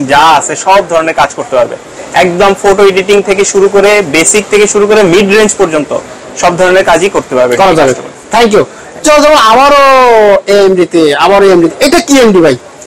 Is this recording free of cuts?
yes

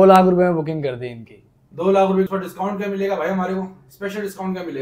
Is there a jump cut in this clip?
yes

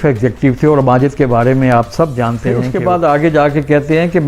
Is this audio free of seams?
no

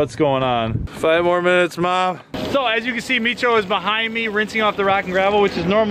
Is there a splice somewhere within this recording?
yes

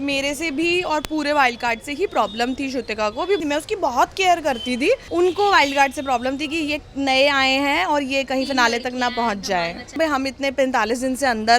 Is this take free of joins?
no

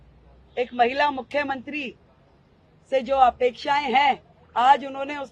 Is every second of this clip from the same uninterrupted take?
yes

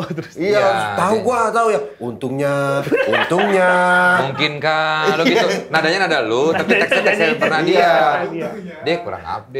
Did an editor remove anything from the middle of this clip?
no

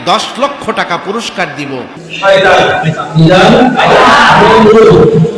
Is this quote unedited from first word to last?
yes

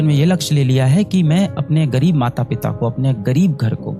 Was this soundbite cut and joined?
no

